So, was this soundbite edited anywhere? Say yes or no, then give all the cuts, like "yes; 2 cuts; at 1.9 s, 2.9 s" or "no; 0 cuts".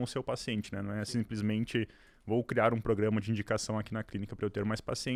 no; 0 cuts